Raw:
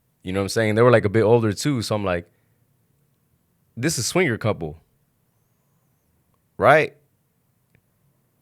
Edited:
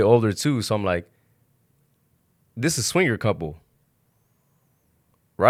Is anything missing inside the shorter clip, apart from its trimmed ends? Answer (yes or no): no